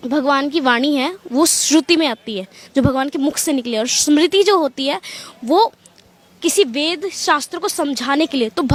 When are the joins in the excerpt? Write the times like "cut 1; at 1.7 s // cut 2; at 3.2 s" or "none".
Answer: none